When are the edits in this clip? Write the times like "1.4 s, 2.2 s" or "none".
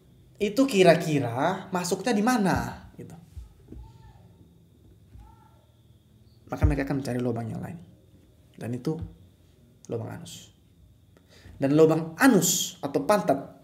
none